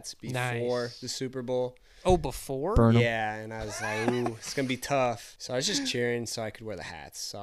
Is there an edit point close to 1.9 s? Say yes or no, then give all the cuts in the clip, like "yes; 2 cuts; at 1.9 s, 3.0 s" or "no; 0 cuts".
no; 1 cut; at 5.3 s